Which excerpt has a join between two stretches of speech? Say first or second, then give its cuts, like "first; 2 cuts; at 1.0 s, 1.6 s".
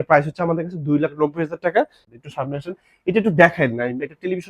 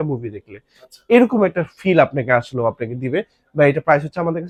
first; 1 cut; at 2.1 s